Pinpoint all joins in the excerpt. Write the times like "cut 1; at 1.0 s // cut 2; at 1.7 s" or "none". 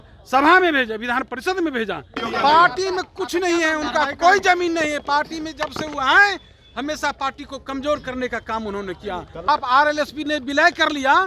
cut 1; at 2.2 s // cut 2; at 9.5 s